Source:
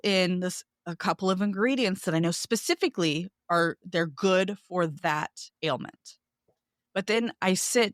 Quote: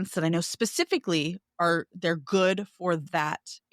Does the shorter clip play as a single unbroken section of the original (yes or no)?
yes